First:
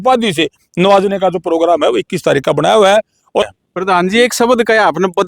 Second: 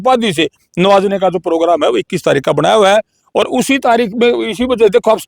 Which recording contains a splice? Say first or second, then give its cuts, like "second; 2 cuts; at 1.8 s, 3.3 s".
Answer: first; 1 cut; at 3.5 s